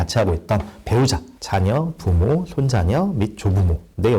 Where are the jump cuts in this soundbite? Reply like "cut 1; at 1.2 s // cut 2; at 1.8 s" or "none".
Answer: none